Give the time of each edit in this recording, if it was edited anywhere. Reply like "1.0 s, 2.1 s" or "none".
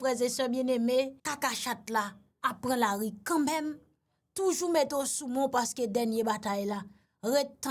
1.2 s, 2.2 s